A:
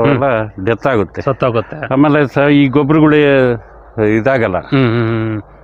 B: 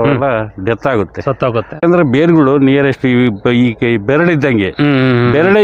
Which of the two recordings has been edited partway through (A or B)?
B